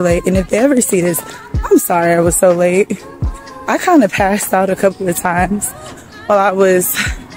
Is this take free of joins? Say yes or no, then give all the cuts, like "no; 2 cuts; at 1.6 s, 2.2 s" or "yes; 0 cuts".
yes; 0 cuts